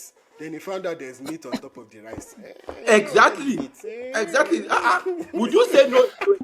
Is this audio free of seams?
yes; 0 cuts

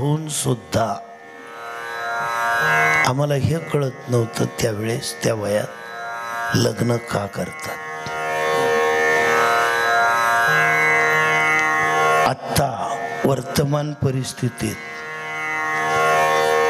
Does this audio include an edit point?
no; 0 cuts

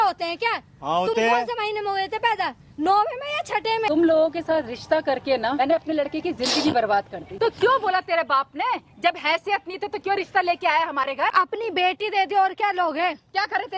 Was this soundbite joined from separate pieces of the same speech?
yes; 4 cuts; at 3.9 s, 5.6 s, 7.2 s, 11.3 s

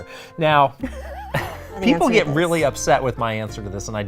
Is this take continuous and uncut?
no; 1 cut; at 1.8 s

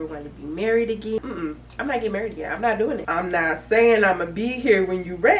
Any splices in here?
yes; 2 cuts; at 1.2 s, 3.0 s

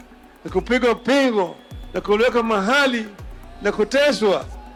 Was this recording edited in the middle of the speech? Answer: no; 0 cuts

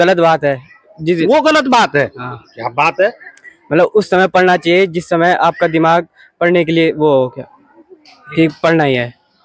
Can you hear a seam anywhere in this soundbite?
no; 0 cuts

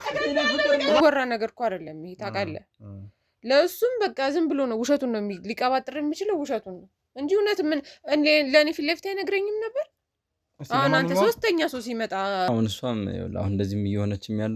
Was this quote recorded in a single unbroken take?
no; 2 cuts; at 1.0 s, 12.5 s

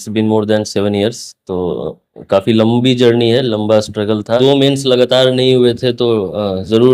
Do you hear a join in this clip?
yes; 1 cut; at 4.4 s

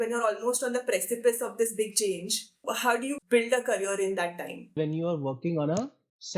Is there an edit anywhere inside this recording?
yes; 2 cuts; at 3.2 s, 4.7 s

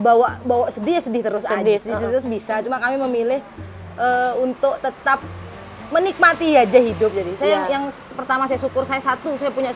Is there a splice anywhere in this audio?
no; 0 cuts

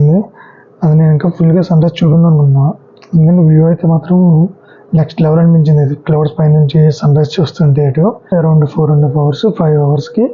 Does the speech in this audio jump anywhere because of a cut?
yes; 1 cut; at 8.3 s

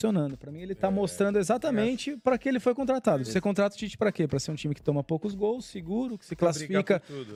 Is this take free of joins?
yes; 0 cuts

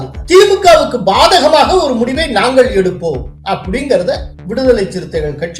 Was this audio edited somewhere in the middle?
yes; 2 cuts; at 3.3 s, 4.3 s

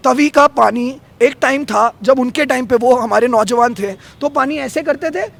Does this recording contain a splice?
no; 0 cuts

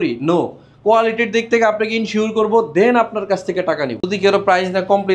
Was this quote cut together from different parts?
yes; 1 cut; at 4.1 s

